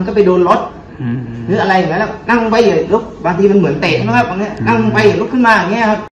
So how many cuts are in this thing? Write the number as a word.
zero